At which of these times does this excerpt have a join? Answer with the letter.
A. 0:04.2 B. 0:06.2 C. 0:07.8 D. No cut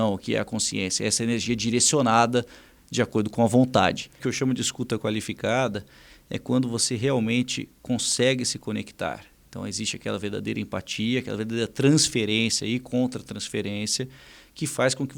A